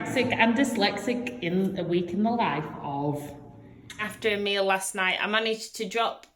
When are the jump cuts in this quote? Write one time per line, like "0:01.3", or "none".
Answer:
0:04.1